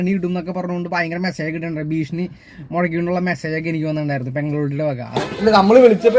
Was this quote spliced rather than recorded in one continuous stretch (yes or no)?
yes